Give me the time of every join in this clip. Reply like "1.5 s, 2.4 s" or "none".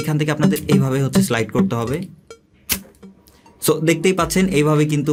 none